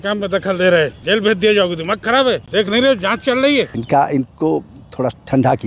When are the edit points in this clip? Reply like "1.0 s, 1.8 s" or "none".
1.0 s, 2.4 s, 3.8 s